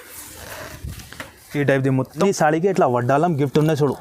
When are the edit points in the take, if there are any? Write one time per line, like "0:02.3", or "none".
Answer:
0:02.2